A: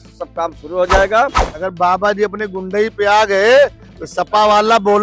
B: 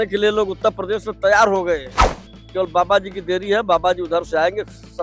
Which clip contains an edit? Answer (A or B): A